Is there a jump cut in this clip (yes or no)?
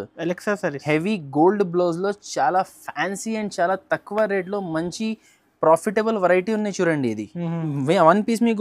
no